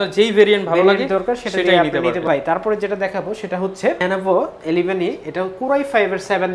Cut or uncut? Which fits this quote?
cut